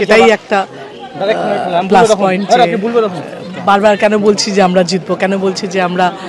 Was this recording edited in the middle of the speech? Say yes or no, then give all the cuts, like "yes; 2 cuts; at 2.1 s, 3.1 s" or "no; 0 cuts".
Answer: no; 0 cuts